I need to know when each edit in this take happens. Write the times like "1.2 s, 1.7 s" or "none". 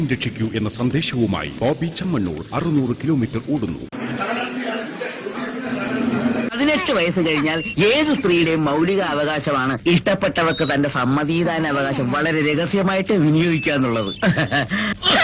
3.9 s